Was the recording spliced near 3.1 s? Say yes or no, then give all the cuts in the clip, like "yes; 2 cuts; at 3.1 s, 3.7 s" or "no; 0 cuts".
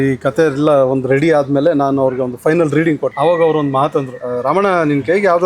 yes; 2 cuts; at 3.1 s, 4.2 s